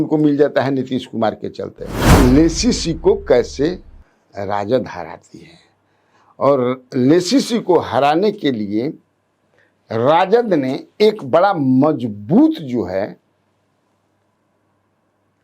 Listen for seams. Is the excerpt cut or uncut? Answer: cut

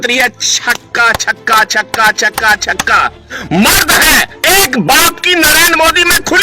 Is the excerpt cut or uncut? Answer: cut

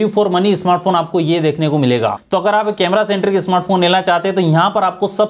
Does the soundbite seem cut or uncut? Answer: cut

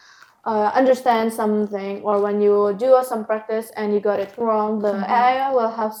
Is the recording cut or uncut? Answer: uncut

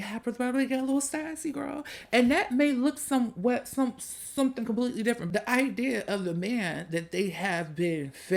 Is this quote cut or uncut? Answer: uncut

